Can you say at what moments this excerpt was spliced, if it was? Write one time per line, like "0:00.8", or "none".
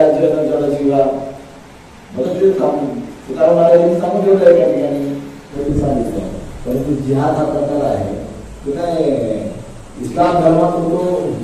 0:05.6